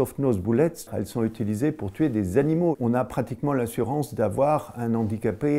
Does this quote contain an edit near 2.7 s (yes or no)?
yes